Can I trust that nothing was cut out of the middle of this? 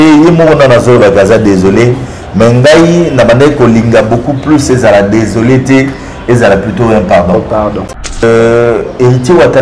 no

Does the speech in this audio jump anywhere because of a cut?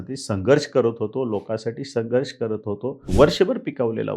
yes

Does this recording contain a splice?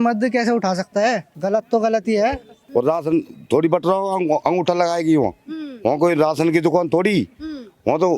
yes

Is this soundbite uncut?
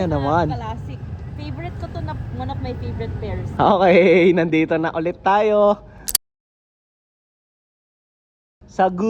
yes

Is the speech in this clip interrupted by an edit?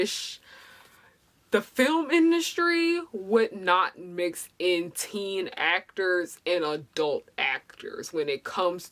no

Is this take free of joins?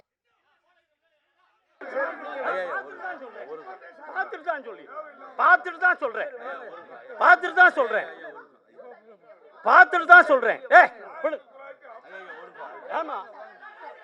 yes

